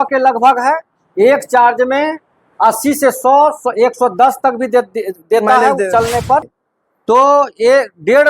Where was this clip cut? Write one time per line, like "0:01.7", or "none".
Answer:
0:06.6